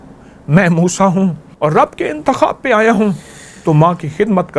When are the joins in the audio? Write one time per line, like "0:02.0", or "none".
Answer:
0:01.5